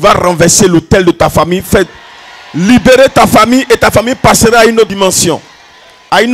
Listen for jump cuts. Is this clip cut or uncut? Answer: uncut